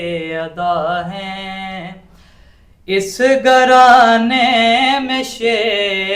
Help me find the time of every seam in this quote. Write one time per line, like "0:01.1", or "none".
none